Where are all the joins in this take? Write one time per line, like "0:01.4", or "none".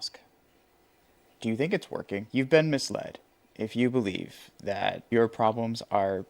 0:02.2
0:05.0